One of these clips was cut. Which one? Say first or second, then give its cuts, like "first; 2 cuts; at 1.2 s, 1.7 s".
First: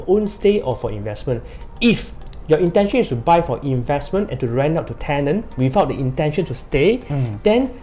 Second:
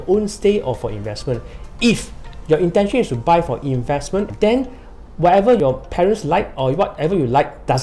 second; 2 cuts; at 4.3 s, 5.6 s